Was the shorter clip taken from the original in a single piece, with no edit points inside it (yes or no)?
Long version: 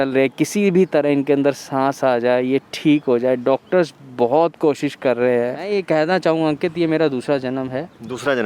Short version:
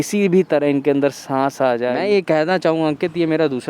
no